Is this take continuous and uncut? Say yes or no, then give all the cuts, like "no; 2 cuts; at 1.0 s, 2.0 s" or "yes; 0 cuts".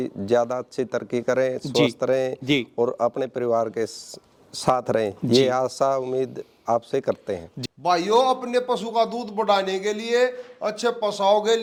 yes; 0 cuts